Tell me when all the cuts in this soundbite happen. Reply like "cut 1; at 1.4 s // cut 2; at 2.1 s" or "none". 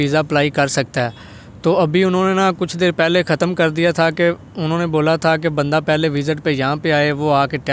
none